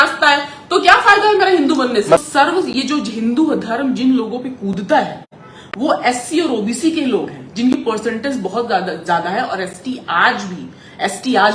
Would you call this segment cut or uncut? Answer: cut